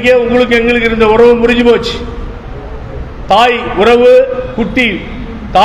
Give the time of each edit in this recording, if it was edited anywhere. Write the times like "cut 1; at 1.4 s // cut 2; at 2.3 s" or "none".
none